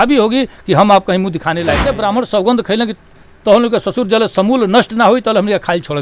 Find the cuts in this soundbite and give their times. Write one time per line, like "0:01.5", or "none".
0:01.8